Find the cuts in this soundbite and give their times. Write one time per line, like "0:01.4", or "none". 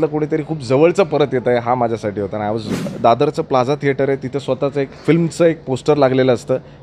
0:02.9